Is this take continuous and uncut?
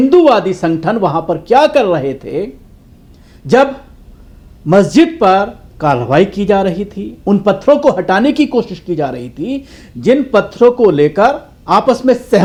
yes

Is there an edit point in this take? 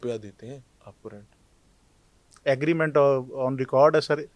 no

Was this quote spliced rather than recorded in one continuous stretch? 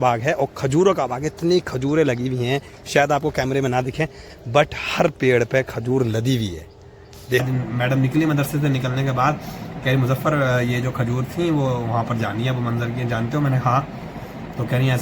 yes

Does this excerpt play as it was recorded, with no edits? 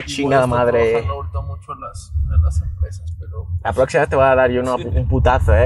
yes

